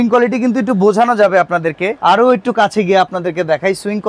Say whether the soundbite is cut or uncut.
cut